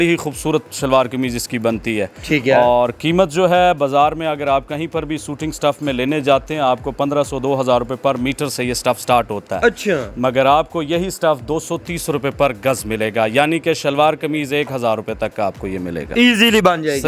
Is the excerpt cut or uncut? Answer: uncut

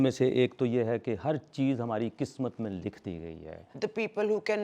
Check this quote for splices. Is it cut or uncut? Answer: cut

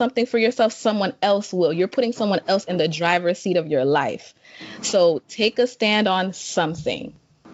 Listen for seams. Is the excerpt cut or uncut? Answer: uncut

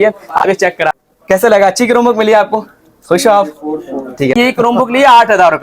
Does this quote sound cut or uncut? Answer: cut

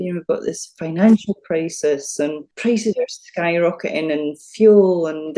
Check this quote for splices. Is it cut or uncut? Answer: cut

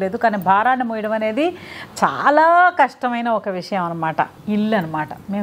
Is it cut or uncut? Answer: cut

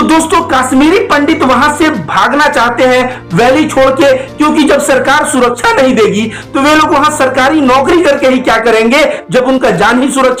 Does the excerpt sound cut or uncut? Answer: uncut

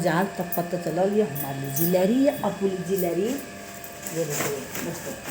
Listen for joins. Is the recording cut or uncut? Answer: uncut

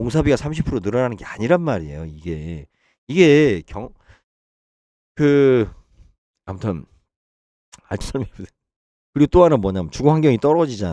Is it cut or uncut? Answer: cut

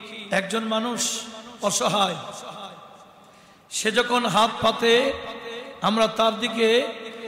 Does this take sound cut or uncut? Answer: uncut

